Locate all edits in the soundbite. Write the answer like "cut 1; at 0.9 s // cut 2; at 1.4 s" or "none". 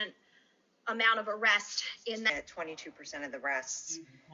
cut 1; at 2.3 s